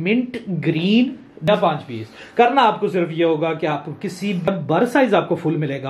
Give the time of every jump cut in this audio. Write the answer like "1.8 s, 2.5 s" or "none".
1.5 s, 4.5 s